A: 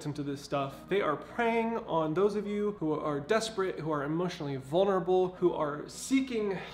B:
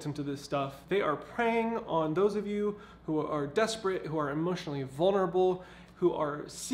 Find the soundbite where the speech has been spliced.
A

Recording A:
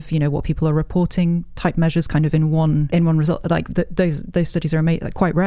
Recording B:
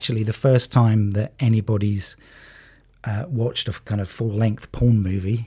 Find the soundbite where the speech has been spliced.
A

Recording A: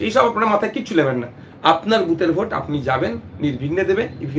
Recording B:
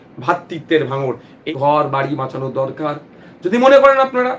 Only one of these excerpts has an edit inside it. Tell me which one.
B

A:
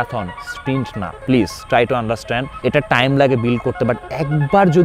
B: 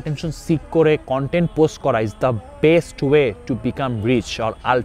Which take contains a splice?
A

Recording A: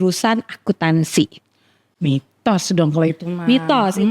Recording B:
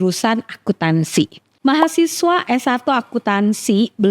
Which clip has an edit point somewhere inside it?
B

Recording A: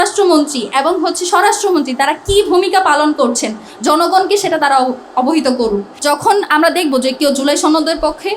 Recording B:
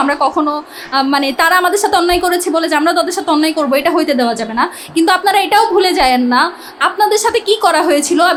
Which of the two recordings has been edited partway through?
A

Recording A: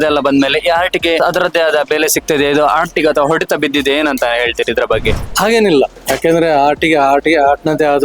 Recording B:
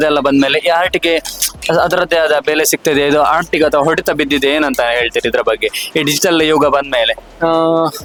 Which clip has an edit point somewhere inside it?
A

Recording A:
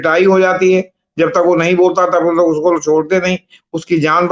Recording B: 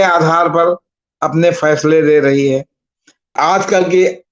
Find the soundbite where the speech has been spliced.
B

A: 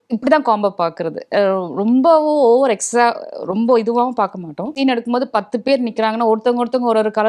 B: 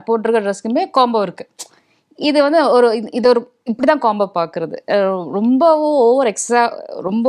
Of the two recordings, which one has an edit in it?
A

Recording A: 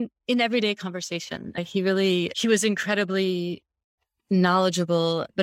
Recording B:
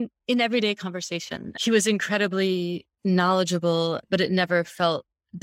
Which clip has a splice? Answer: B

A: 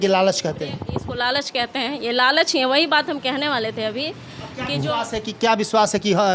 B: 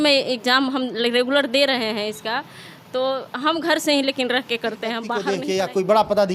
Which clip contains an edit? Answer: B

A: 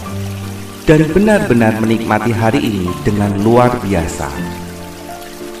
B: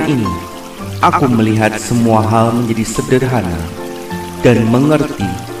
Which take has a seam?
A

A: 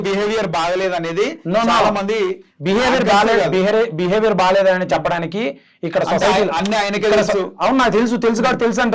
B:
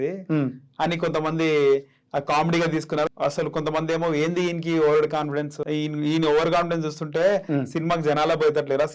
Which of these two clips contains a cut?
B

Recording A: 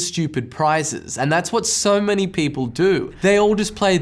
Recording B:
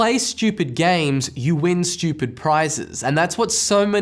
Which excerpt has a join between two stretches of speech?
A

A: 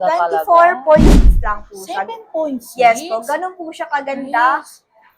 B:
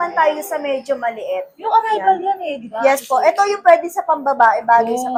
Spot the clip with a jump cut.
A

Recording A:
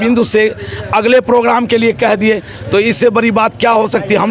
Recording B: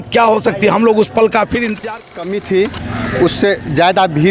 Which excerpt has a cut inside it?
B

